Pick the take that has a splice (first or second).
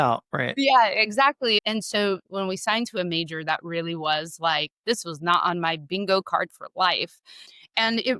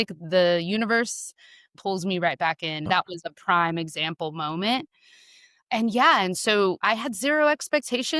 first